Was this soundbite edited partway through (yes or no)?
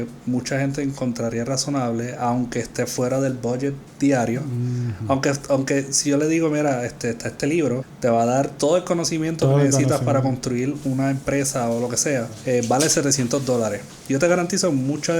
yes